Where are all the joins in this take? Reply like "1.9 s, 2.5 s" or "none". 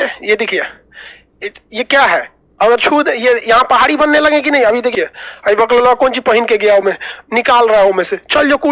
4.9 s